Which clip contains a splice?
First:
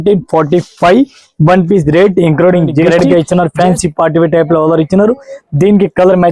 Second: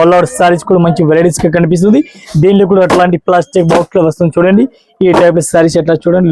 first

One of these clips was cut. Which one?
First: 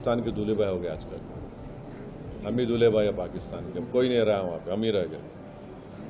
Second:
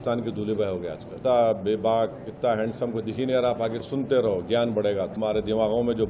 second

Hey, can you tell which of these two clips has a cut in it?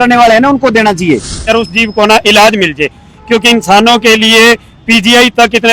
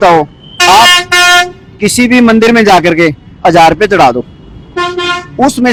first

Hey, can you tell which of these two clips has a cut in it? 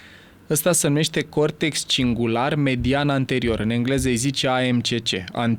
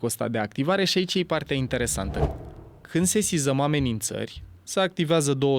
second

